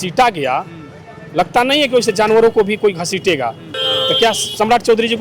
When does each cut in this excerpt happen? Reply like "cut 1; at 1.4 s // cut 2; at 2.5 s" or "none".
cut 1; at 3.7 s